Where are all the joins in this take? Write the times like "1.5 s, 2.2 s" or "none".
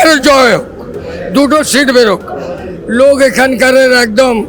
none